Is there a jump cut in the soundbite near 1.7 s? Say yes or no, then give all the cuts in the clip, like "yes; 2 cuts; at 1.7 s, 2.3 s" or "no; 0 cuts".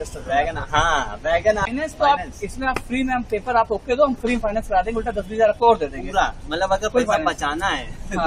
yes; 1 cut; at 1.7 s